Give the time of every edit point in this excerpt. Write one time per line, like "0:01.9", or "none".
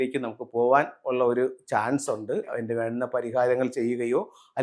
0:02.5